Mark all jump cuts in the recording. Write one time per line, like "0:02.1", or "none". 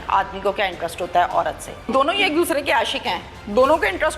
0:01.9